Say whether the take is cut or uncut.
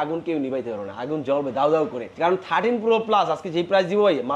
cut